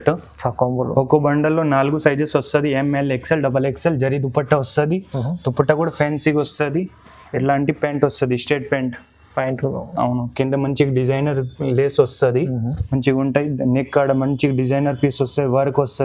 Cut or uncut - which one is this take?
uncut